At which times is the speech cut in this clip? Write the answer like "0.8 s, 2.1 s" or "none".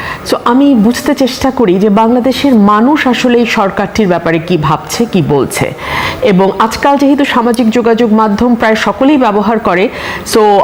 none

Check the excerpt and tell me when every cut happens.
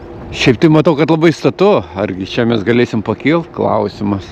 none

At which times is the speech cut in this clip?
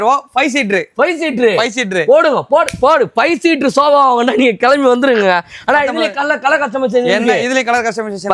none

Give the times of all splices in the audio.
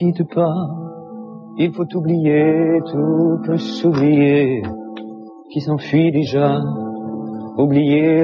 6.8 s

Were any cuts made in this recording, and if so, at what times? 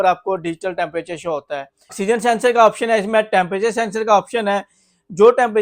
1.7 s

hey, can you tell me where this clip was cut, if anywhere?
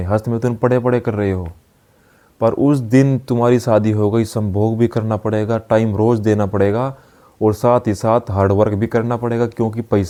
none

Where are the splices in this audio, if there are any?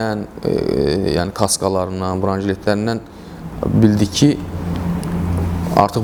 none

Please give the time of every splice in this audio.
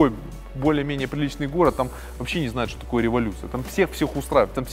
none

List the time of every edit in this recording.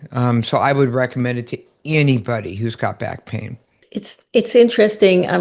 none

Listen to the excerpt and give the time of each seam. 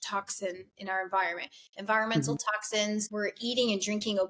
3.1 s

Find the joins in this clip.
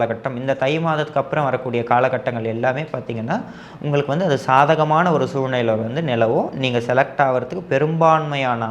none

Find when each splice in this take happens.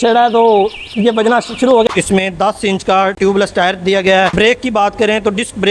1.9 s, 4.3 s

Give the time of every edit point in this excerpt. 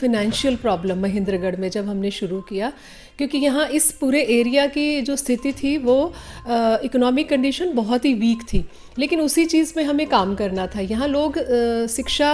none

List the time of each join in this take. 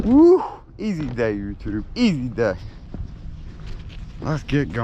none

